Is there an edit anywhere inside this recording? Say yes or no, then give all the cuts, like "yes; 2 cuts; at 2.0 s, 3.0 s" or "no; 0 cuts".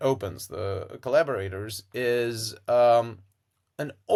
no; 0 cuts